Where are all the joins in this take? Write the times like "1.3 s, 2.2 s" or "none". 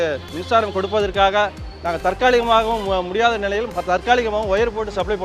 none